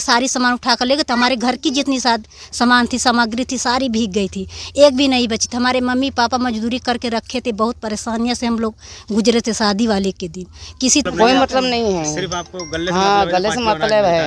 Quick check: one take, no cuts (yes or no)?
no